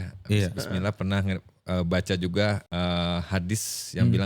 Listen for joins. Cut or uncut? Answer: cut